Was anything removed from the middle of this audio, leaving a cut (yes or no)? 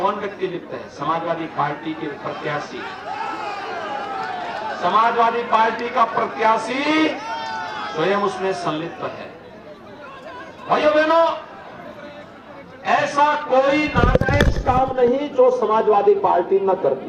no